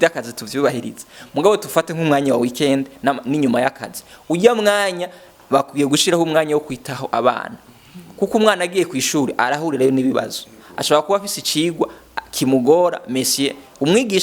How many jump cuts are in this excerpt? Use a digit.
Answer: 0